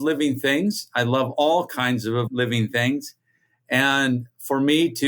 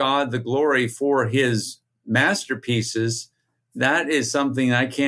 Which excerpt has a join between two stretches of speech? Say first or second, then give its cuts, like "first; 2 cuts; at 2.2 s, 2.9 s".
first; 1 cut; at 2.3 s